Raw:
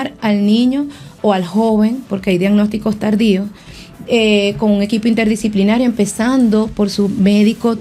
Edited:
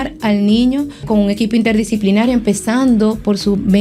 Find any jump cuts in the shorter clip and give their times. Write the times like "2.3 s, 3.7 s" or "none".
1.0 s